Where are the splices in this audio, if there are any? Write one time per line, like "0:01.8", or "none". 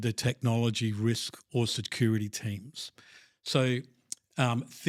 none